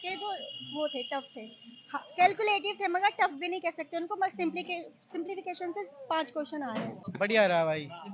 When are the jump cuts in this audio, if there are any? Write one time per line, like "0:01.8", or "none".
0:07.0